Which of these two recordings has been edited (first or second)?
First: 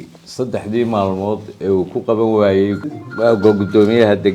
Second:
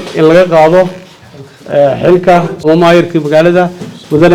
second